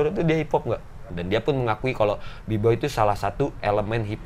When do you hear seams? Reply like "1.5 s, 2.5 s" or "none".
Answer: 1.1 s